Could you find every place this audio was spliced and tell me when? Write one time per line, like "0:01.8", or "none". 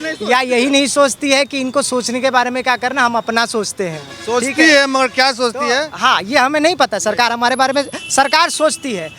none